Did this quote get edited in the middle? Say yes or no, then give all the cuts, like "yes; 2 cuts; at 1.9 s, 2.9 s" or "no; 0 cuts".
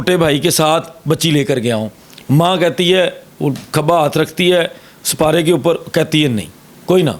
no; 0 cuts